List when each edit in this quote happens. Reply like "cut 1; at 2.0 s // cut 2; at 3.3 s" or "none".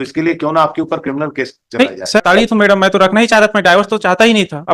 cut 1; at 2.2 s